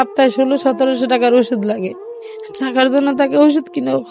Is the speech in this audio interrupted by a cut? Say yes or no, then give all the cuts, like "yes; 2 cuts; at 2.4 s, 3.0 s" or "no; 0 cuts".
no; 0 cuts